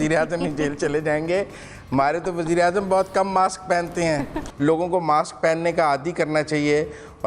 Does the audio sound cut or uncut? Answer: cut